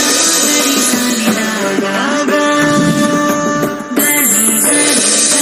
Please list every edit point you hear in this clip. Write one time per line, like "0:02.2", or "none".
none

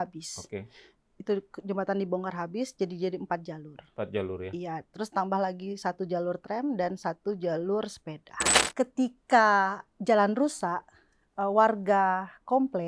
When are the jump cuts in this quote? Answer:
0:08.5

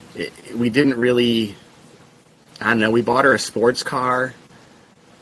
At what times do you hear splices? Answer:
none

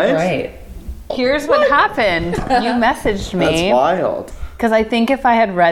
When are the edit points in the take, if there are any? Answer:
0:01.0

